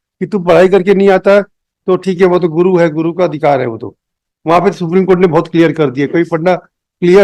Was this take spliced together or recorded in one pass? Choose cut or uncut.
uncut